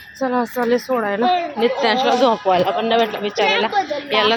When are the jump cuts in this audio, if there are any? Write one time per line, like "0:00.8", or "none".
none